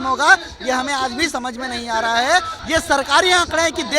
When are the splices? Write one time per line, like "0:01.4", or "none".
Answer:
0:02.6

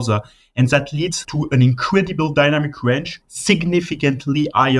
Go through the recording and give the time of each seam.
0:01.2
0:03.1

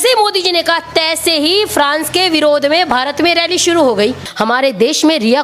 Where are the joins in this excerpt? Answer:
0:04.3

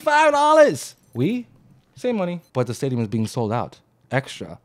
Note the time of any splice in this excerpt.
0:01.0
0:02.4

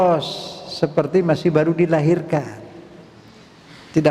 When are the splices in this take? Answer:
none

